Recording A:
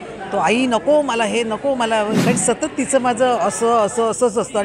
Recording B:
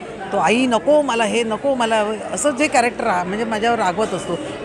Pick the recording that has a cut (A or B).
A